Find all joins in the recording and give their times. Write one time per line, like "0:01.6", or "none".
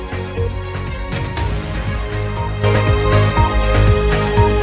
none